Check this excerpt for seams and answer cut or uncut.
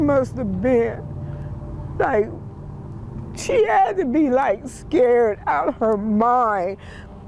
uncut